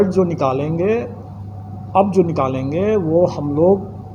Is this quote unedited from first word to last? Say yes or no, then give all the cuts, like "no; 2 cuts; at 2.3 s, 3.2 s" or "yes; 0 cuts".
yes; 0 cuts